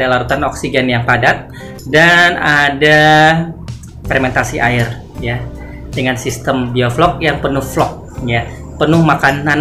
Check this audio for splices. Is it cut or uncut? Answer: uncut